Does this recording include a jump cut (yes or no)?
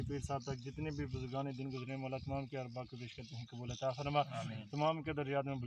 no